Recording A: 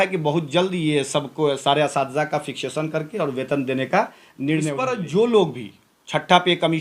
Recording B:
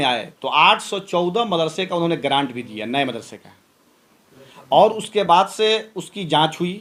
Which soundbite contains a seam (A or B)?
A